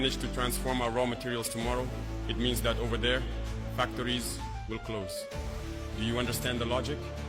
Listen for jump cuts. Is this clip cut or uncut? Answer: uncut